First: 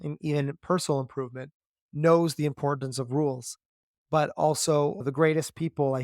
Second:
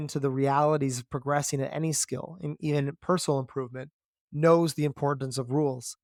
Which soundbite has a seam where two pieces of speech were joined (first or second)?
first